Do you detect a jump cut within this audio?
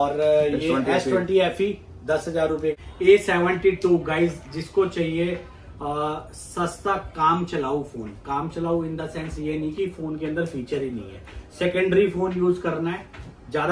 yes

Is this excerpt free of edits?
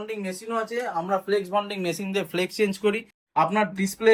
yes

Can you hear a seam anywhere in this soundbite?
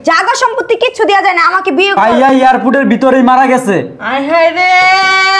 yes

